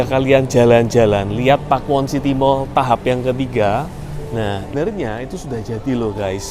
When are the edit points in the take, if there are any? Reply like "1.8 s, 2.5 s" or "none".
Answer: 4.7 s